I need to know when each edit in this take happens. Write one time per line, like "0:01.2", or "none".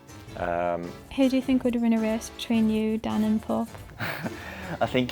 0:01.0